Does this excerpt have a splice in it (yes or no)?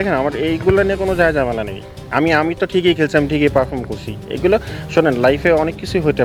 no